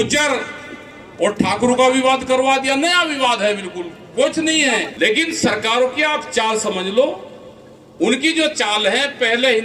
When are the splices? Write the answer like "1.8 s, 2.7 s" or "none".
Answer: 4.9 s